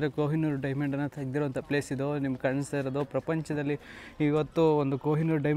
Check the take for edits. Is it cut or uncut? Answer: uncut